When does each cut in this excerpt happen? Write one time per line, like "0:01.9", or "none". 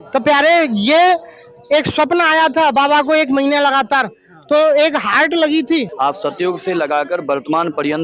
0:05.9